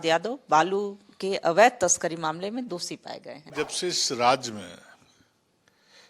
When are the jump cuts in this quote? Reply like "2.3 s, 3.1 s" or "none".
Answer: 3.4 s